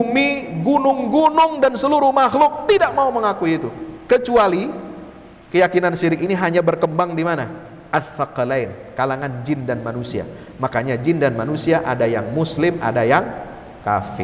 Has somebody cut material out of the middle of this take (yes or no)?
no